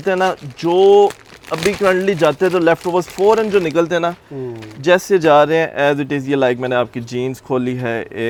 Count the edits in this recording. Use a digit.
0